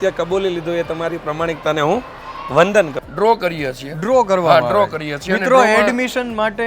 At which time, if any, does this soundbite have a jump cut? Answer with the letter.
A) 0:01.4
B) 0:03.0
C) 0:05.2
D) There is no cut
B